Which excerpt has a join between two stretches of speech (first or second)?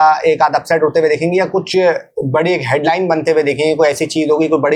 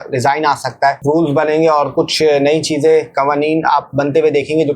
second